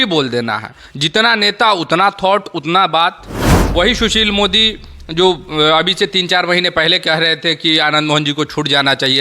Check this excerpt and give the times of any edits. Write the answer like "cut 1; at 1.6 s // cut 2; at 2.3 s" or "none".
cut 1; at 3.6 s

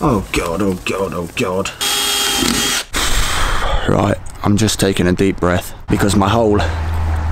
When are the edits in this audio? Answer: cut 1; at 1.8 s // cut 2; at 2.9 s // cut 3; at 5.7 s

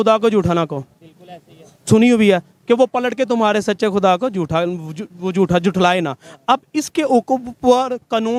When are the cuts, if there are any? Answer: none

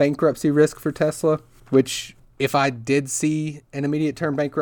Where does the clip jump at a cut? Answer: none

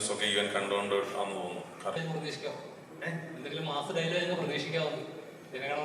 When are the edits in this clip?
cut 1; at 2.0 s

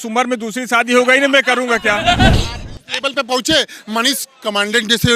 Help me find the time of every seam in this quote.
cut 1; at 2.3 s

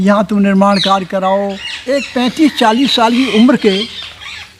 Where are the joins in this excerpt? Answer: cut 1; at 1.7 s

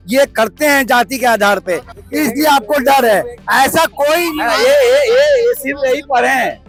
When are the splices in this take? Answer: none

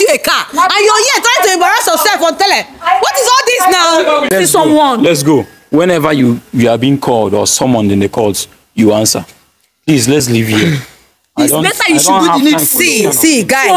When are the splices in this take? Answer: cut 1; at 4.3 s

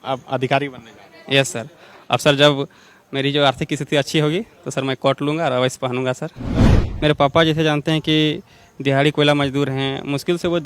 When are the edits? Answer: cut 1; at 6.8 s

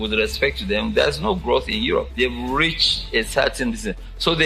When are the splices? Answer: cut 1; at 2.1 s

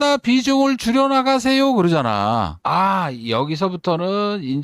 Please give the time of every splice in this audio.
cut 1; at 2.5 s

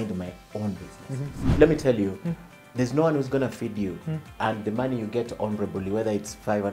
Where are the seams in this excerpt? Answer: cut 1; at 1.5 s

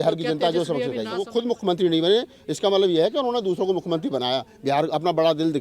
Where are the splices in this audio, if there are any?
cut 1; at 1.3 s

